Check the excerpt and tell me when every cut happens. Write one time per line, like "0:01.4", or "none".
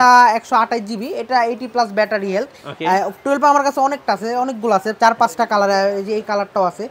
none